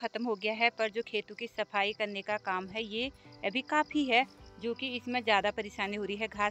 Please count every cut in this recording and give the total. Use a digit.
0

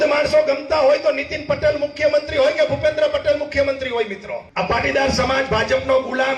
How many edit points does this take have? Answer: 1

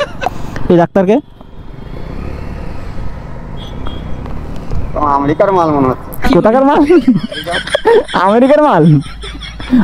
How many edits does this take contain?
1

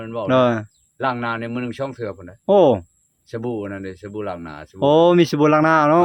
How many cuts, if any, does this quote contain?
0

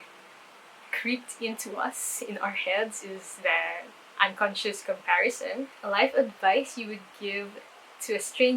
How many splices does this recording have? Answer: 1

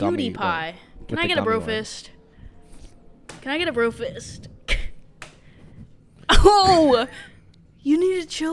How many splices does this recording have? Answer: 0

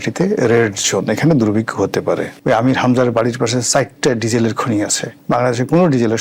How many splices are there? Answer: 2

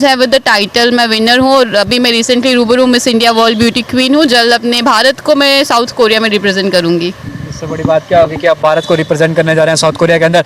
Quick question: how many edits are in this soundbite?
0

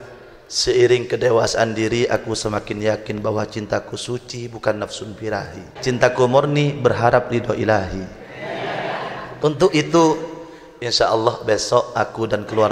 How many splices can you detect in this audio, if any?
2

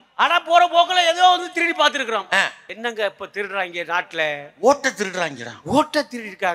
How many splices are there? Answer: 1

